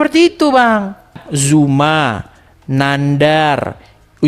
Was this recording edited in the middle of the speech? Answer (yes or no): yes